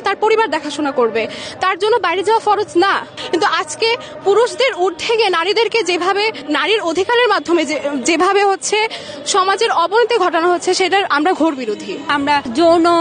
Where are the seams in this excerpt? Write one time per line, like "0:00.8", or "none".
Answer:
0:03.2
0:06.4
0:12.2